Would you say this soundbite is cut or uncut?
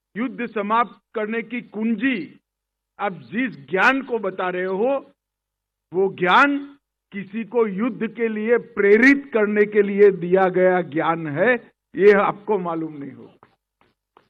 uncut